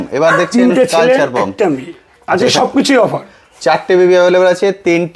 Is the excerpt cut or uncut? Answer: uncut